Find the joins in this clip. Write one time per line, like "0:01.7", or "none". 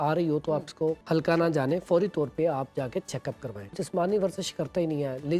0:01.0
0:03.7